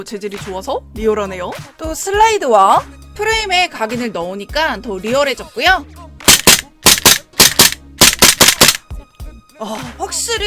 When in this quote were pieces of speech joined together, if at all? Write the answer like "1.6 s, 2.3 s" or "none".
6.0 s